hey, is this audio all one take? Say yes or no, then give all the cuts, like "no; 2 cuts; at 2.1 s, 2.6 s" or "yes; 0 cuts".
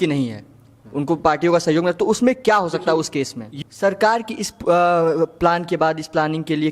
no; 1 cut; at 3.4 s